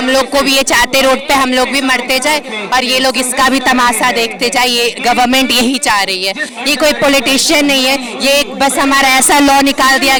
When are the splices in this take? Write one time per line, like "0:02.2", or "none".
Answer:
none